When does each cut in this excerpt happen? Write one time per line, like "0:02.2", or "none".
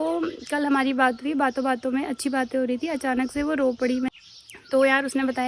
0:04.1

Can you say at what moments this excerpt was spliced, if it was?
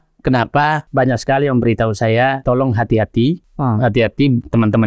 0:00.8
0:02.4
0:03.5

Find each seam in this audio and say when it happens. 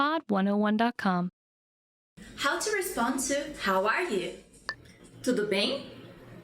0:02.0

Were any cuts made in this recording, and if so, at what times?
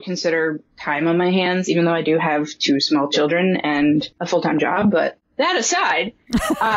0:04.2

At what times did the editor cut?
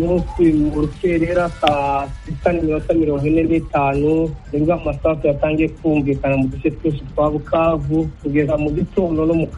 0:04.4
0:08.2

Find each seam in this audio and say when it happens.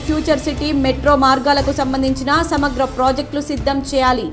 none

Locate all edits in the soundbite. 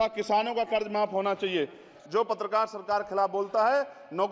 0:01.9

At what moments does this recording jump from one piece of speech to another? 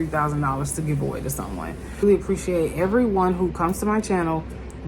0:02.0

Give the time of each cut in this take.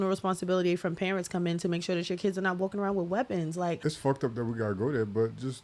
0:03.8

